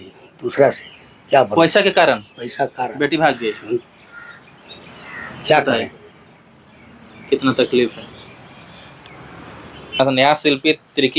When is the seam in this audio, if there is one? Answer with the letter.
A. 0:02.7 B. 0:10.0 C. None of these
B